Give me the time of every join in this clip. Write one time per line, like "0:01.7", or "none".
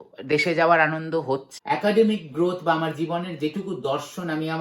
0:01.5